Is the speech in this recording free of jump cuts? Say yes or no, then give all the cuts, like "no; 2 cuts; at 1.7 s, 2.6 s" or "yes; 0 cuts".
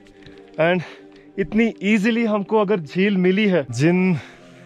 no; 1 cut; at 3.7 s